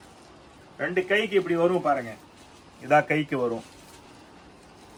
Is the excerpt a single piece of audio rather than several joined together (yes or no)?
yes